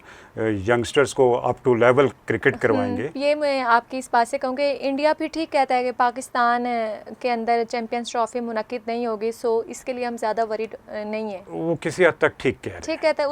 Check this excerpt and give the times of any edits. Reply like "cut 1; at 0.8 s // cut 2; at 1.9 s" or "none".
cut 1; at 3.2 s // cut 2; at 11.5 s